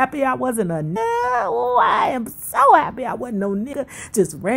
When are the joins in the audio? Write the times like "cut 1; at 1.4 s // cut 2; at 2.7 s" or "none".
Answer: cut 1; at 1.0 s // cut 2; at 3.7 s